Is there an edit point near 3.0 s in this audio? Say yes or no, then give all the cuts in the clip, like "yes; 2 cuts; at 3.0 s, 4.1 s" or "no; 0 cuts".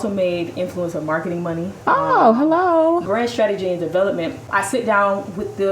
yes; 2 cuts; at 3.0 s, 4.4 s